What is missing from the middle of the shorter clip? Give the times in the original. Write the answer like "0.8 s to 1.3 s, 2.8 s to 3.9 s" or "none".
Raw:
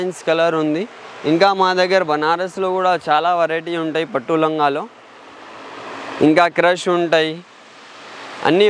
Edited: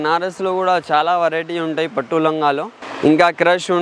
5.0 s to 6.0 s